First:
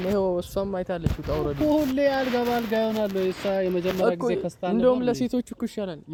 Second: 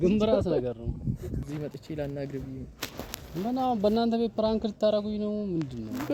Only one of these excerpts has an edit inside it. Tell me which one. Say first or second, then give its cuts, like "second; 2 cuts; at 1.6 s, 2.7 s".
second; 1 cut; at 1.4 s